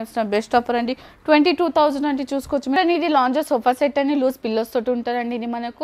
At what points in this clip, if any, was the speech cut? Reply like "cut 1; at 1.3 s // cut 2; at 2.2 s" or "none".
cut 1; at 2.8 s